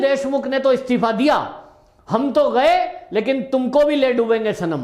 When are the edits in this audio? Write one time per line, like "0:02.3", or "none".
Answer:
none